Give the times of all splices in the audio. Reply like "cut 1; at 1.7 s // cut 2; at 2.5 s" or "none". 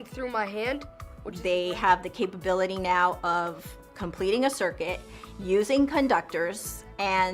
cut 1; at 1.3 s